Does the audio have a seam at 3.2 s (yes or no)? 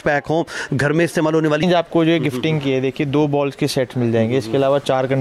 no